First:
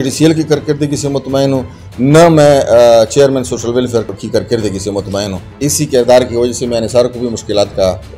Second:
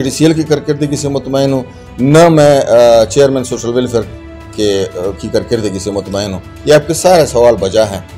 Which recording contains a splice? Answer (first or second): first